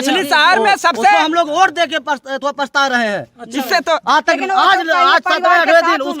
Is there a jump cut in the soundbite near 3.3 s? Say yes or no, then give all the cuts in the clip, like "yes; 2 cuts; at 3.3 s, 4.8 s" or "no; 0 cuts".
no; 0 cuts